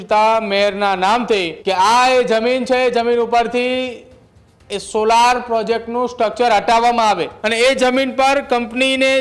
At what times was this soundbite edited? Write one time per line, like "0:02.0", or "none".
0:01.5
0:07.3

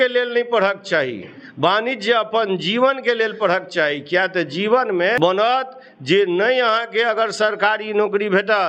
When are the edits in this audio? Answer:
0:05.2

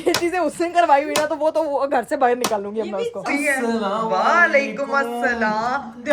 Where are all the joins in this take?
0:03.2

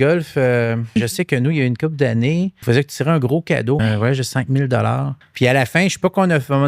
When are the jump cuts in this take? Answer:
0:00.9
0:02.6
0:03.8
0:05.2

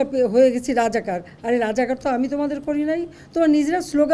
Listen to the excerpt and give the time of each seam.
none

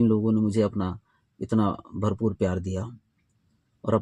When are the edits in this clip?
none

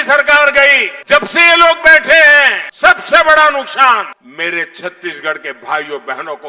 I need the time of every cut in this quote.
0:00.9
0:02.6
0:04.2

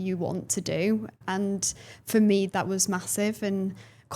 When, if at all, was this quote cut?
0:01.1
0:02.5

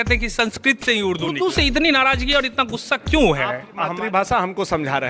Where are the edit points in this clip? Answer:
0:01.4
0:03.9

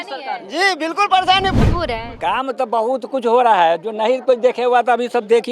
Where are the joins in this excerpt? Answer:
0:01.6

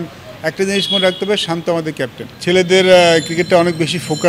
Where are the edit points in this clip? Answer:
0:02.2

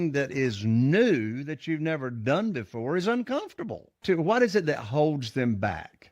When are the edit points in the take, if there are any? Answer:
0:04.0

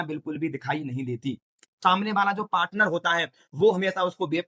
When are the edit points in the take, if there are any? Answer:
0:01.8

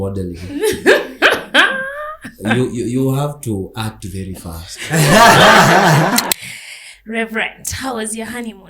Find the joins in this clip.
0:06.3

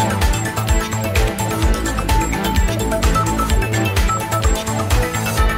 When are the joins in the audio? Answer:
0:03.1

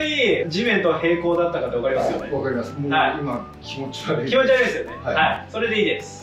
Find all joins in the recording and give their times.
none

